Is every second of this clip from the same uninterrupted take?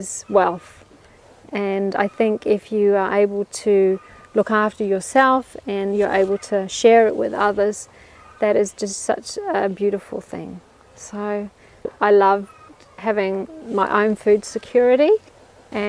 no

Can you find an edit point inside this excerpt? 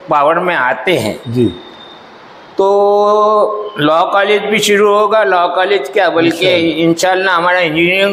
no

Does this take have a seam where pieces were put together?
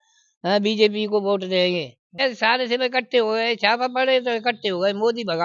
yes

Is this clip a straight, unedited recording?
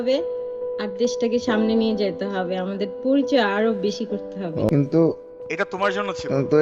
no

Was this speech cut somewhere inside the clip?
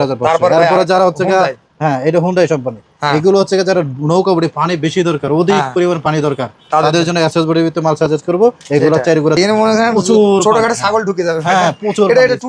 yes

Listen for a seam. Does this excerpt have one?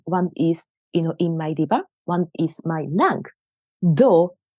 no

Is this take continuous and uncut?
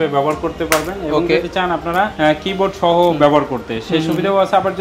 yes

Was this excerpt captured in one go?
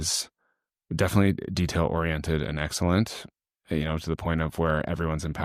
yes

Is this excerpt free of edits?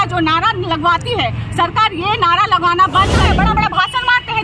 no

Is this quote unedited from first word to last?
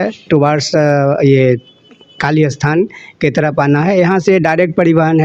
yes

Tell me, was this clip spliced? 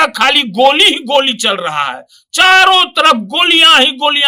no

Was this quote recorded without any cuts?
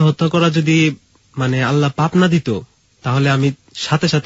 yes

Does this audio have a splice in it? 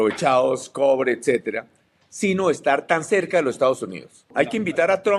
yes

